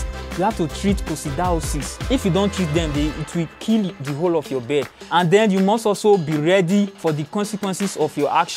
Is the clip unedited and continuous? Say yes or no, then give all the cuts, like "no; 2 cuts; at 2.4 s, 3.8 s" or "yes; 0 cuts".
no; 4 cuts; at 2.1 s, 4.0 s, 5.0 s, 6.9 s